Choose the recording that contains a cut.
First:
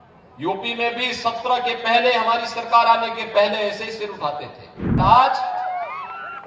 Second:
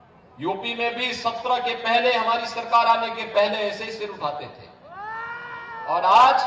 first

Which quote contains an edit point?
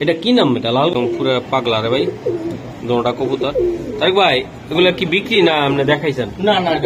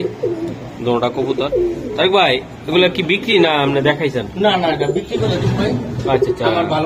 first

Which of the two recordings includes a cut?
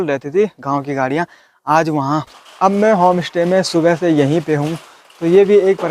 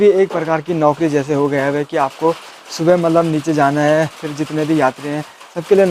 first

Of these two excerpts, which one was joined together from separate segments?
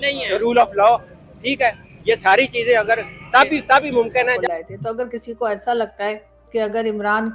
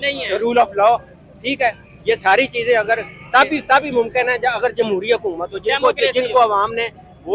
first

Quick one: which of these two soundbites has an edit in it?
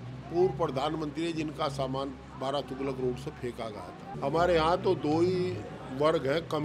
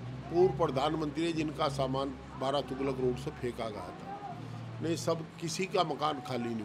first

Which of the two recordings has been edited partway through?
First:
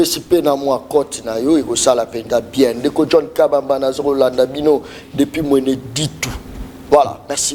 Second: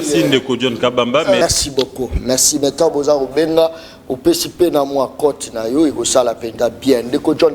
second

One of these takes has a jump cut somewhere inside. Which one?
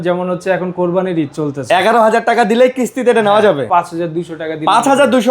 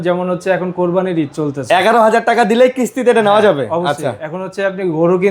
first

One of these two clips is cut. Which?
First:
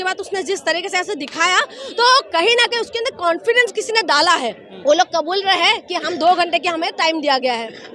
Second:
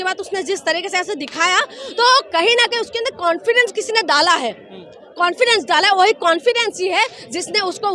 first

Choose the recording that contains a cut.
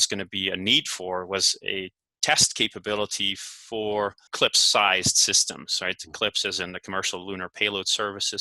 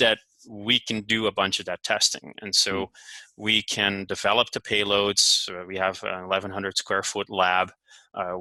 first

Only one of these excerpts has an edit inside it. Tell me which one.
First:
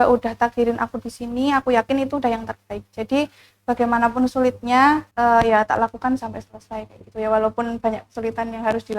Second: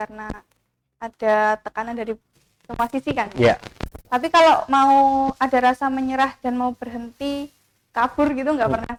first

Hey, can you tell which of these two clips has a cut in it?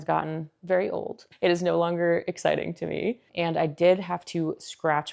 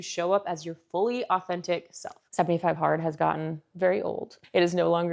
second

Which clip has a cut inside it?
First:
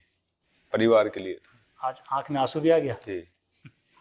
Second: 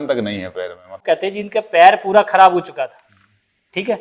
second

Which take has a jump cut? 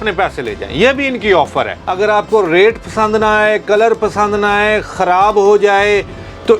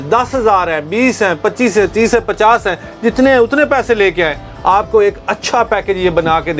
first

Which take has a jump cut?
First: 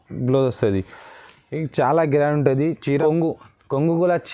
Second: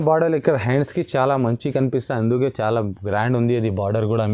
first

